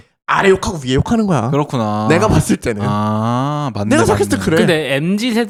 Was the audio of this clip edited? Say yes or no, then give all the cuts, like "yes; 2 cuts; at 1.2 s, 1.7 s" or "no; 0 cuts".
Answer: no; 0 cuts